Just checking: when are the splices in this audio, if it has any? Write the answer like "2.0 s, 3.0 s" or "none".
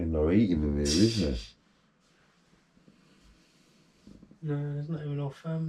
none